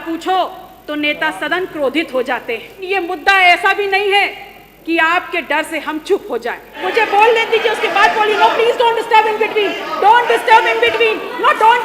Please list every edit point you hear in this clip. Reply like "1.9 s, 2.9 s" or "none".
2.8 s, 6.8 s